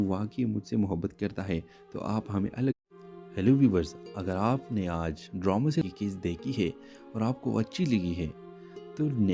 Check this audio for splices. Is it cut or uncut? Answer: cut